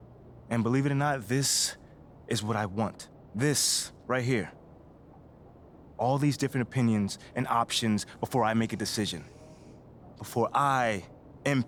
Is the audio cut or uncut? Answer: uncut